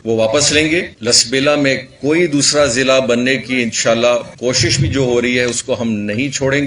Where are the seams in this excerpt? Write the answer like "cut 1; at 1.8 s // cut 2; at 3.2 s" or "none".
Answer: cut 1; at 0.9 s // cut 2; at 4.3 s